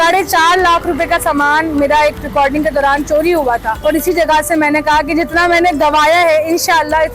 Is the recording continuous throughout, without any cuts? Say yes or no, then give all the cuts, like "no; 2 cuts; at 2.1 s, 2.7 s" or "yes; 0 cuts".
no; 1 cut; at 3.7 s